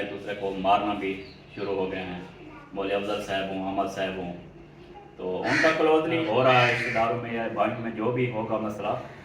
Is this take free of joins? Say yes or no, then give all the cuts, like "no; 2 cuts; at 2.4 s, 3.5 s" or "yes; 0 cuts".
no; 1 cut; at 6.2 s